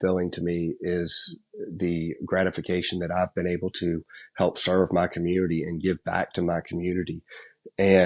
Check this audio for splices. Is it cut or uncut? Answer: uncut